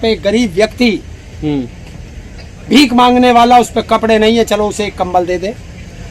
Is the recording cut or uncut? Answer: uncut